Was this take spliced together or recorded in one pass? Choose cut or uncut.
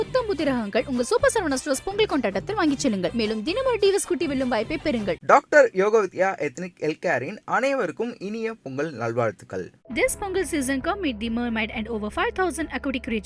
uncut